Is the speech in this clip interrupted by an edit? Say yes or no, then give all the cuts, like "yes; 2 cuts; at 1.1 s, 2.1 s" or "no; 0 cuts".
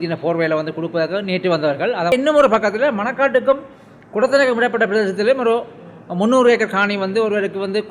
yes; 1 cut; at 2.1 s